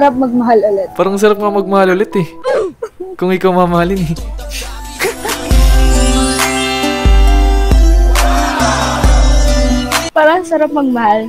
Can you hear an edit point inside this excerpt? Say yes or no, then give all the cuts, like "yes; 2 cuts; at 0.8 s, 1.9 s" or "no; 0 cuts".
no; 0 cuts